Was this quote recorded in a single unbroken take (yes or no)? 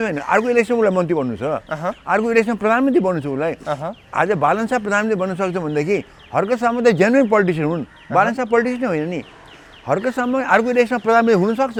yes